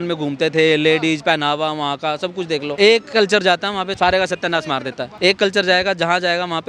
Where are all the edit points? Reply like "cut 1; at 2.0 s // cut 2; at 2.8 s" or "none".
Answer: cut 1; at 2.7 s // cut 2; at 3.9 s // cut 3; at 5.1 s